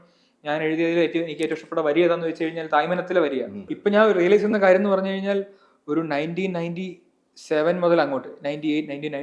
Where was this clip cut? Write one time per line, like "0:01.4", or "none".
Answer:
0:03.6